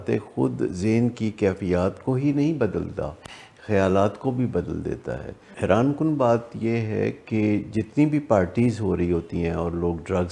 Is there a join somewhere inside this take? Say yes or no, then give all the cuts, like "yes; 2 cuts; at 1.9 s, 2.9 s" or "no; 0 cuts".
yes; 1 cut; at 5.5 s